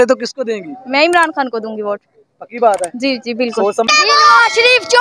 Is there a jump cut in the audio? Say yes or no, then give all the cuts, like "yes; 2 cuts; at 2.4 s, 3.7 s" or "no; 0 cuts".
yes; 1 cut; at 3.9 s